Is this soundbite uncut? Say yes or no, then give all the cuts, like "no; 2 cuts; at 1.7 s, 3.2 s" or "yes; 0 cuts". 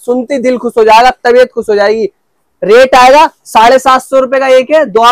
yes; 0 cuts